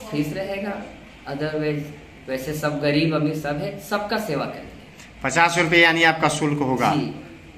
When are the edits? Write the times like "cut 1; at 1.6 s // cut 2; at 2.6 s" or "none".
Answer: none